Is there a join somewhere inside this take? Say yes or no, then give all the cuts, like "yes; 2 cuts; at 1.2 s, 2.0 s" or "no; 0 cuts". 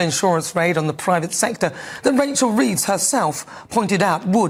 no; 0 cuts